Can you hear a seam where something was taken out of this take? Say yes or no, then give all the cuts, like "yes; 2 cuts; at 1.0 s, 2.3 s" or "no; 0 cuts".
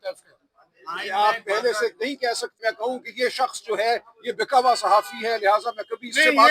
yes; 1 cut; at 2.6 s